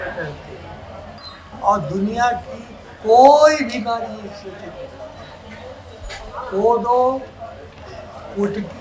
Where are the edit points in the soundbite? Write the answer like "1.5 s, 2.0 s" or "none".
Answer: 1.2 s

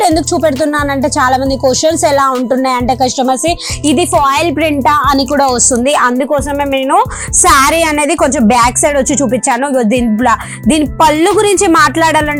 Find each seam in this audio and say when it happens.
none

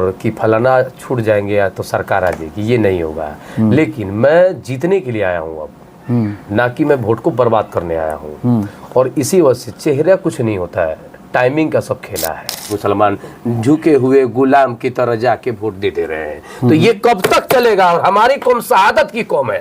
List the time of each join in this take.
12.6 s

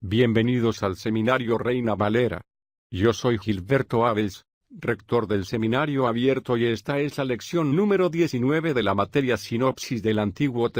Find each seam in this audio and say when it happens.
none

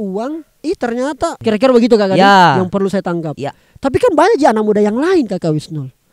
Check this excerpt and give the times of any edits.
1.4 s

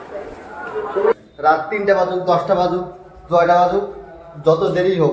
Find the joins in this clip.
1.2 s

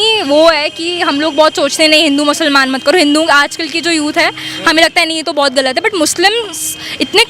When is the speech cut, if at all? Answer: none

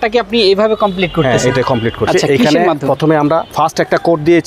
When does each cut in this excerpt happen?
3.5 s

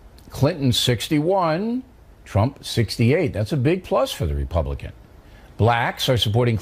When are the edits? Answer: 1.3 s

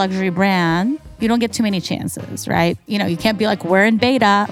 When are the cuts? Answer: 1.1 s, 2.8 s

